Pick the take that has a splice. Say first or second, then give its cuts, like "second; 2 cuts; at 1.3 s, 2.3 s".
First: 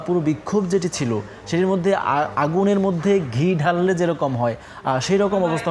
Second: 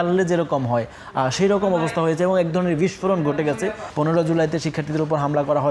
second; 1 cut; at 3.8 s